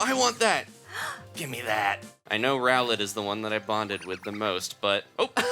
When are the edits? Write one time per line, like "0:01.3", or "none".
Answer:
0:02.1